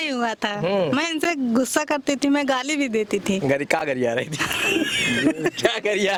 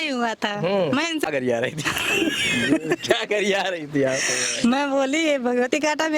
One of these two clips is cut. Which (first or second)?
second